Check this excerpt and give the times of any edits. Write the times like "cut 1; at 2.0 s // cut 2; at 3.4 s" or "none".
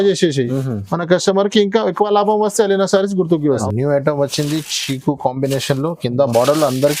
cut 1; at 3.6 s